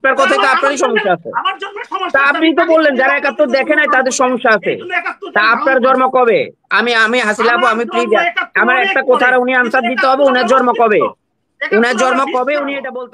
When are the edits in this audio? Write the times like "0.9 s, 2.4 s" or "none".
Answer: none